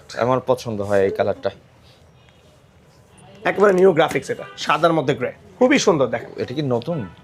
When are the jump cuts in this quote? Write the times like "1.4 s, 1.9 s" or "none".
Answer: 3.1 s, 6.3 s

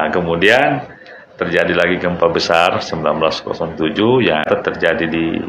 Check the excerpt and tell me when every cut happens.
4.5 s

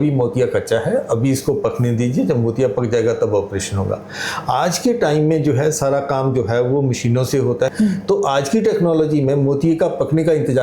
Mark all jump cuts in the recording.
7.7 s

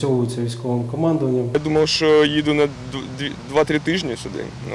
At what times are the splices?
1.5 s

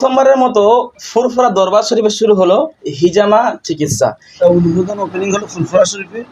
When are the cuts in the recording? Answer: 4.2 s

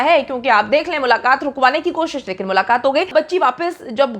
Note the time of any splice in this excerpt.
3.1 s

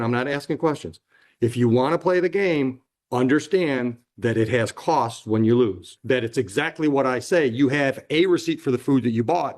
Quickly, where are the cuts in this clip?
5.9 s

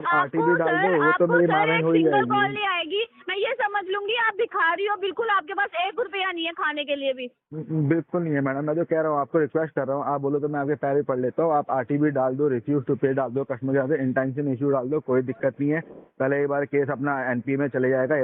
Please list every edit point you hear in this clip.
none

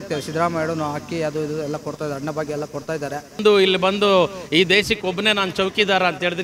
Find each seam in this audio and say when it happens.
3.4 s

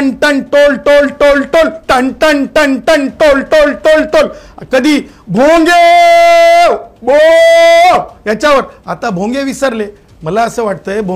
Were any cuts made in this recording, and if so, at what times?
none

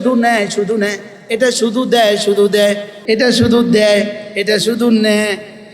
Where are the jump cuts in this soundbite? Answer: 2.9 s

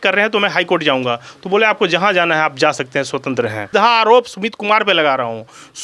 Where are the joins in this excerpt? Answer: 3.6 s

